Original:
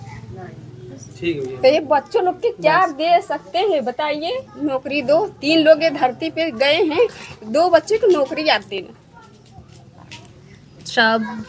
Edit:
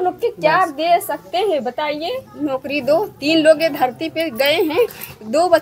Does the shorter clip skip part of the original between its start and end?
no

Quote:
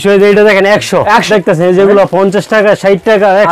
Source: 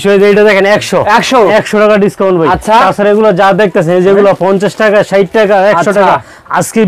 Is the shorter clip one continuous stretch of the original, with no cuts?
no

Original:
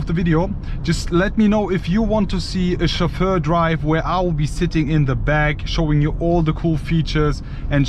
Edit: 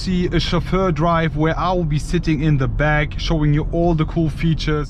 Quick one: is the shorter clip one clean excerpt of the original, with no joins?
yes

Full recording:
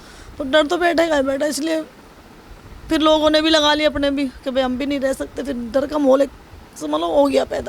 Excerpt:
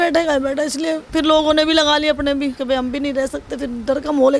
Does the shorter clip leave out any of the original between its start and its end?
yes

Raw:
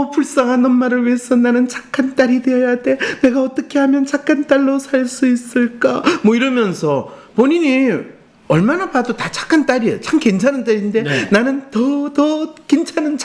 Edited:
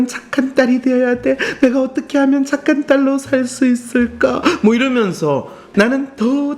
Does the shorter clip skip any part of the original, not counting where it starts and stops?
yes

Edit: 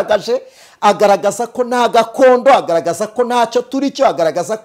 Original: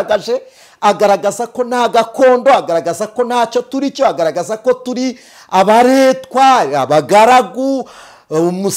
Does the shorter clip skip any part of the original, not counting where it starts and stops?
no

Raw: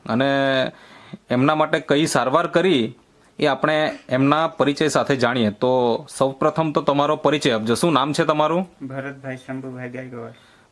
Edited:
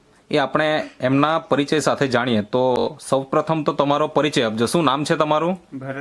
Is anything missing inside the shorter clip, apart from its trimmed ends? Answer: no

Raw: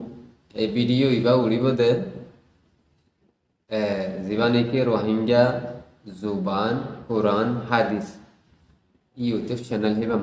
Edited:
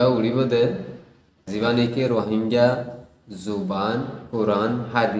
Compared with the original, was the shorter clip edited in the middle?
yes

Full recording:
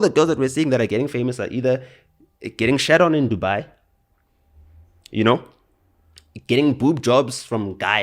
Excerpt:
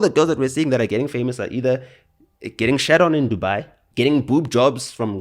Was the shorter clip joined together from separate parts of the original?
yes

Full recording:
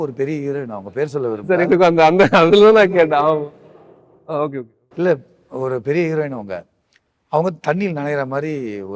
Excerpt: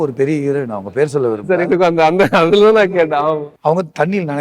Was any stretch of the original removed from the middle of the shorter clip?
yes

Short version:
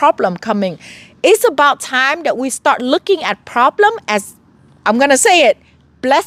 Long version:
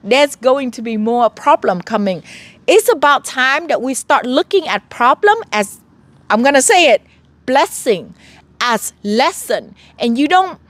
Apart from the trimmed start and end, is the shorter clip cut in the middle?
no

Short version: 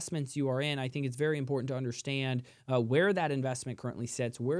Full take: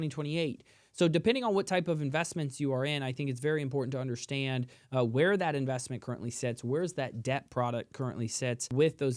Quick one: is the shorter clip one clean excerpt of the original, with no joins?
yes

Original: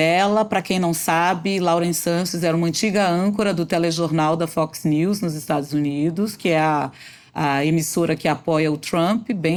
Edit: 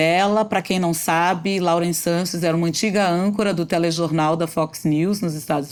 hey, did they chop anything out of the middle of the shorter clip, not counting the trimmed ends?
no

